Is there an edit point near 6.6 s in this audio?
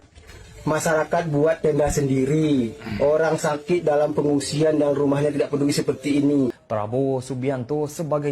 yes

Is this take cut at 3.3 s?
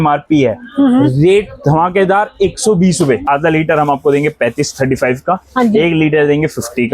yes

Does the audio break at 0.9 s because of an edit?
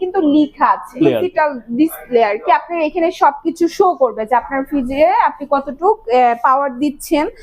yes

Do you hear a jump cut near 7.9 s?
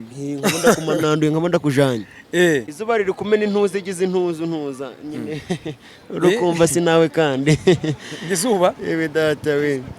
no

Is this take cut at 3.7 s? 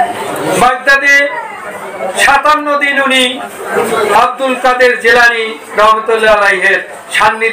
yes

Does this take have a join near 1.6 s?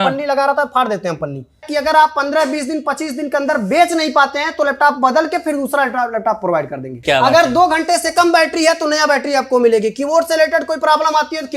yes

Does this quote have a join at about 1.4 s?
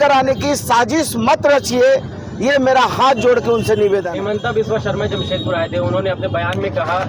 no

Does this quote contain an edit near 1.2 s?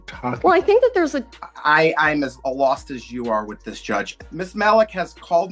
yes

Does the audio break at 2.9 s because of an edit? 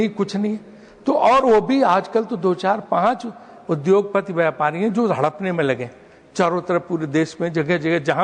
no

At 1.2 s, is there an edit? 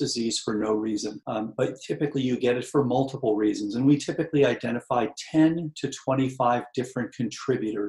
yes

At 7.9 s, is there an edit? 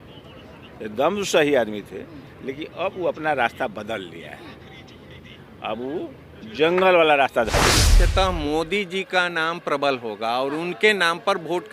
yes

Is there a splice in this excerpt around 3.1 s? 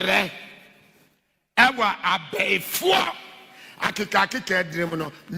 no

